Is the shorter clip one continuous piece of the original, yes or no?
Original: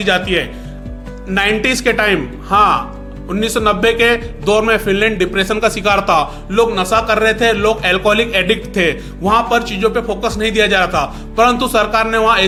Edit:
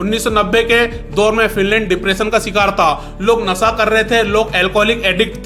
yes